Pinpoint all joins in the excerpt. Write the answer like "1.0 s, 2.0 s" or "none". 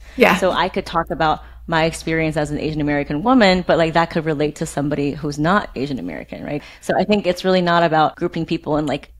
6.7 s, 8.2 s